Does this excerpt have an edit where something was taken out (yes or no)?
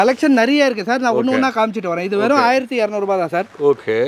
no